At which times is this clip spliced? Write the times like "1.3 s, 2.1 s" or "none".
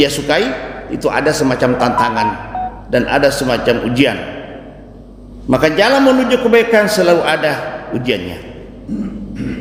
none

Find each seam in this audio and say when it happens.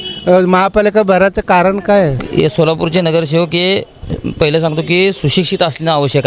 2.2 s

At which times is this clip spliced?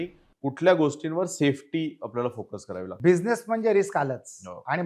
2.9 s

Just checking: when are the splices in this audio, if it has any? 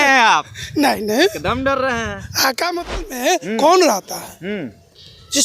3.1 s

